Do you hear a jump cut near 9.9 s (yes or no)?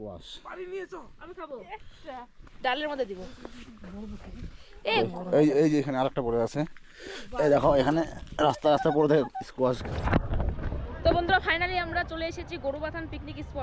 yes